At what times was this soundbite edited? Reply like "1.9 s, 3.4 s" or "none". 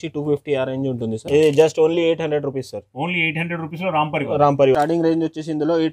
1.2 s, 4.7 s